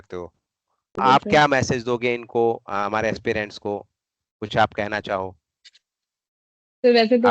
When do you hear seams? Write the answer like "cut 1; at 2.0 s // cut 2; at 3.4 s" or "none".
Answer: none

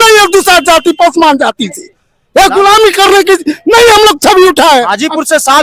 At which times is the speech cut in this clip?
none

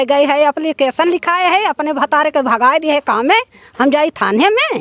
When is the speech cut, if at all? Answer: none

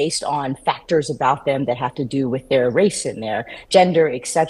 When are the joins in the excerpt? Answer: none

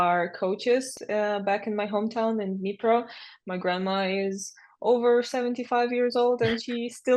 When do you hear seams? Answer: cut 1; at 0.9 s

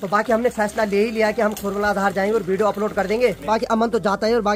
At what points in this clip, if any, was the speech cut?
none

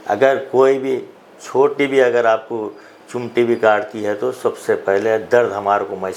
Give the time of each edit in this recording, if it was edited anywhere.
none

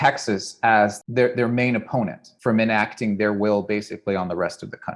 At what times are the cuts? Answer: cut 1; at 1.0 s // cut 2; at 2.3 s

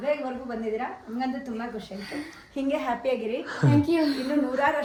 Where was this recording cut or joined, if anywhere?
none

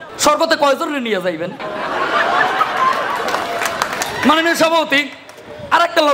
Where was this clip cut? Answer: none

